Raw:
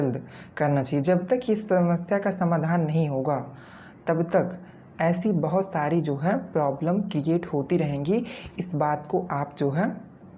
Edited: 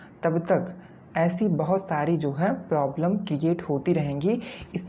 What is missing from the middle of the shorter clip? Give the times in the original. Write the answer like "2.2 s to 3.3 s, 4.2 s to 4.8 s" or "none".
none